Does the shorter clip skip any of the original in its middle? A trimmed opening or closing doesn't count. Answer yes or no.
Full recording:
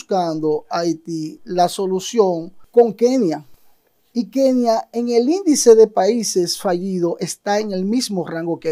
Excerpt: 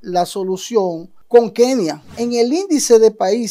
yes